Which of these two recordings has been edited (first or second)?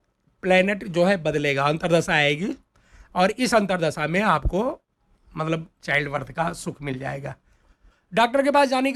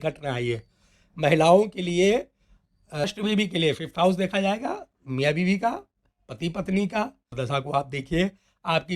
second